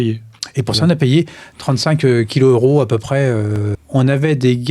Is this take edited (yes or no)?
yes